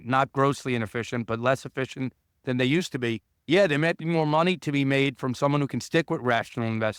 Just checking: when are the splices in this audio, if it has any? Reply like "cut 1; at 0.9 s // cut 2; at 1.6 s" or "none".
none